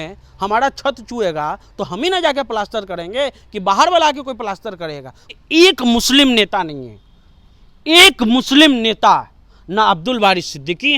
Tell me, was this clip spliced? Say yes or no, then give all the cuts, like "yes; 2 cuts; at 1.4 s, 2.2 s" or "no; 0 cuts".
yes; 1 cut; at 5.4 s